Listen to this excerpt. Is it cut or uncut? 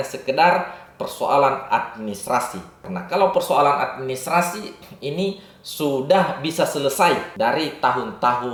uncut